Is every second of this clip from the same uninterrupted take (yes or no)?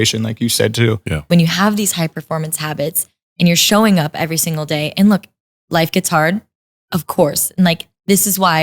no